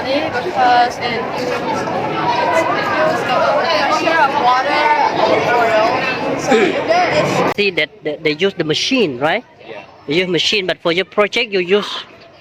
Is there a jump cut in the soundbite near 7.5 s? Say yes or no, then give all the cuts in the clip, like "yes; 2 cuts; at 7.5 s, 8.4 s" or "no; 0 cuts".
yes; 1 cut; at 7.5 s